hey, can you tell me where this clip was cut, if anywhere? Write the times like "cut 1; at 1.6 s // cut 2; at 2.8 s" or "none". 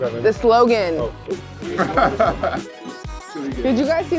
cut 1; at 2.7 s